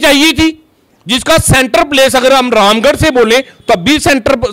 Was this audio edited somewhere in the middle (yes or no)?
no